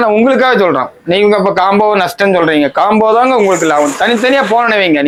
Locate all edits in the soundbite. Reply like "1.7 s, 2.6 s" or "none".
none